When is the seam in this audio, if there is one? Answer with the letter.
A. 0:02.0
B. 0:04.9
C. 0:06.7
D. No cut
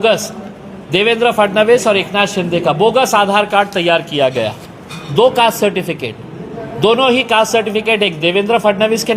B